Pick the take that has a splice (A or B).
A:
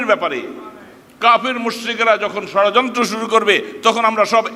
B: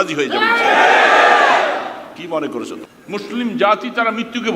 B